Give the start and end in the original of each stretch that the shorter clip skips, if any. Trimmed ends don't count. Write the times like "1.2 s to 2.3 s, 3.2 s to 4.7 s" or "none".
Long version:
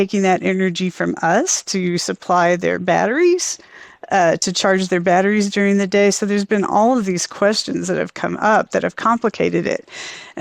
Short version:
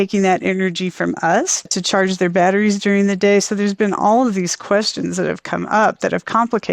1.7 s to 4.4 s